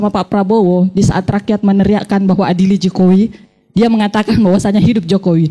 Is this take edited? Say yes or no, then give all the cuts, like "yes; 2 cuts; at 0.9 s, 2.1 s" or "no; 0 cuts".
no; 0 cuts